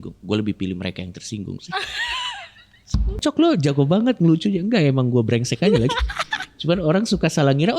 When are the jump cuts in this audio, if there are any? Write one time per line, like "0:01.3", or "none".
0:03.1